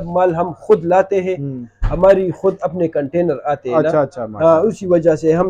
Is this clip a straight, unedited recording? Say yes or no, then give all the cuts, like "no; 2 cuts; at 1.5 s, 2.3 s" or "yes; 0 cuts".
yes; 0 cuts